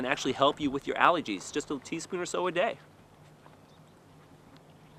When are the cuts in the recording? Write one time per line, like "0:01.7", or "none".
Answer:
none